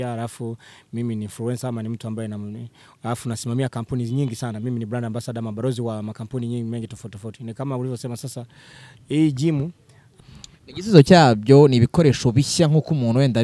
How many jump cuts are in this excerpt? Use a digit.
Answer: 1